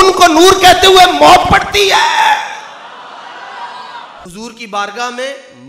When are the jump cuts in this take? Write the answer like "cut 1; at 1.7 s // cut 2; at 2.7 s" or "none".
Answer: cut 1; at 4.2 s